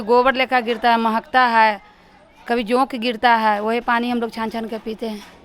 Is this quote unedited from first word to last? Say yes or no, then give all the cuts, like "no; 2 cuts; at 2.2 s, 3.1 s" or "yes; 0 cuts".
yes; 0 cuts